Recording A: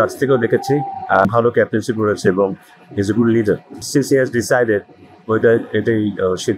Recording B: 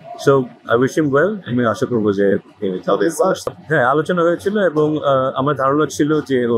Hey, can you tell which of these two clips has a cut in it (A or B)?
A